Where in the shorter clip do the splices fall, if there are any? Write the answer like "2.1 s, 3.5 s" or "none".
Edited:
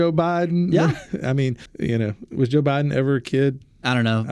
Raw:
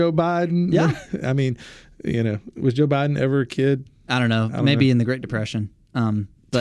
1.7 s